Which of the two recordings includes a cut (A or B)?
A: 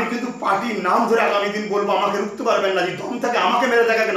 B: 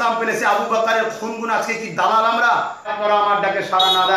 B